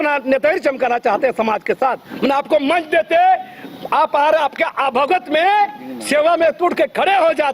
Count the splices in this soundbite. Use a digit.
1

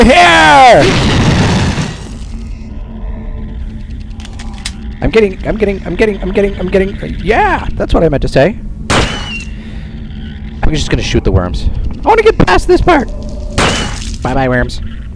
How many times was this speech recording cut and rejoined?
0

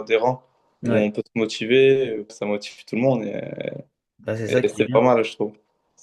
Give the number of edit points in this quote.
1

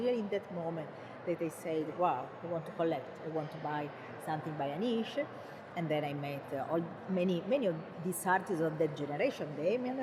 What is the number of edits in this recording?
0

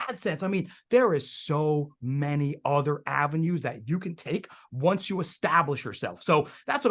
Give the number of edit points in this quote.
0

